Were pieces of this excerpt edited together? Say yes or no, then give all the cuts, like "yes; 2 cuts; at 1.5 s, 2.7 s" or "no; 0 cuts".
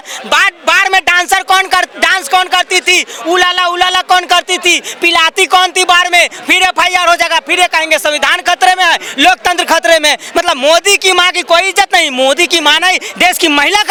no; 0 cuts